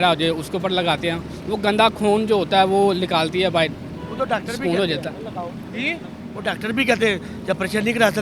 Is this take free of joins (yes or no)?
yes